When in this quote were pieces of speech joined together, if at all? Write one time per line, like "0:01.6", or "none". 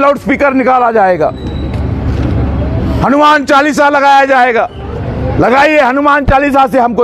none